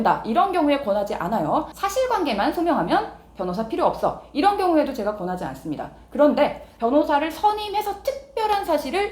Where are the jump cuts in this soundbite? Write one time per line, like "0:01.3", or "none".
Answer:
0:01.8